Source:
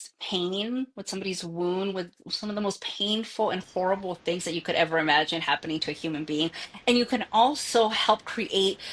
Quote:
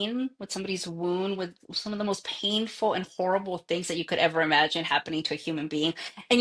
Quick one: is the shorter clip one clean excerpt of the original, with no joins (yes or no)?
yes